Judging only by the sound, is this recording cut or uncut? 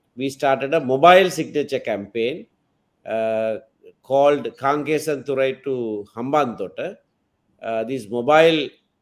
uncut